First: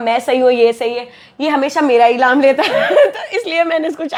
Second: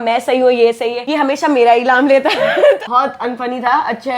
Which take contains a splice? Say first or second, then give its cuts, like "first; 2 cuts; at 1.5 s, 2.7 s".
second; 2 cuts; at 1.0 s, 2.8 s